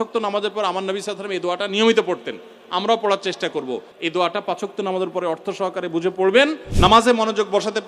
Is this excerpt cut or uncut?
cut